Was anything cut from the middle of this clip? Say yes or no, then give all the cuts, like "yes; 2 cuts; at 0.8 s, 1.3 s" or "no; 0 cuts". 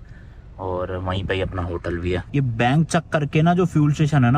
no; 0 cuts